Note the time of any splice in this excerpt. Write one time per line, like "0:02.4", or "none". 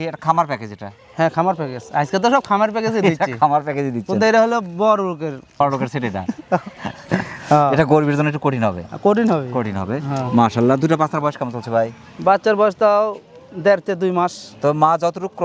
none